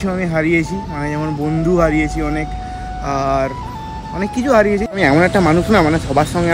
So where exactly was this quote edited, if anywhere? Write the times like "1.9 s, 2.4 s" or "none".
4.9 s